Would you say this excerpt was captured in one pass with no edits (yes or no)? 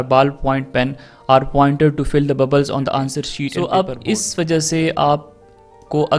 no